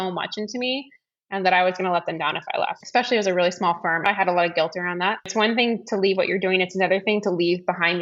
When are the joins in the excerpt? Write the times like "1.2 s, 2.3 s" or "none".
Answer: 2.8 s, 4.1 s, 5.3 s